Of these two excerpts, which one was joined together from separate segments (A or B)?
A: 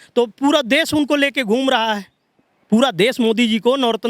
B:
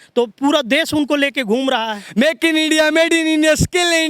B